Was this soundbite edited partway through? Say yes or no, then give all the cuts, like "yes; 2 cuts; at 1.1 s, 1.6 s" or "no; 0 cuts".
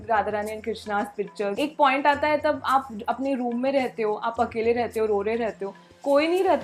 yes; 1 cut; at 1.5 s